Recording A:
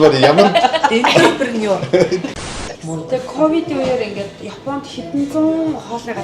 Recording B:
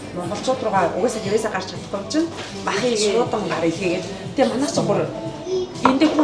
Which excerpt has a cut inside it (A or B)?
A